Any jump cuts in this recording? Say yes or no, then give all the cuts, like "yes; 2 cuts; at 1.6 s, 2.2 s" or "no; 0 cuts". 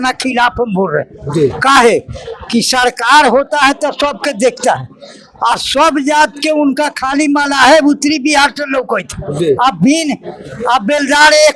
no; 0 cuts